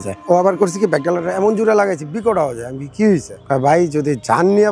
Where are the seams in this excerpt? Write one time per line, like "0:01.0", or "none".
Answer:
0:03.3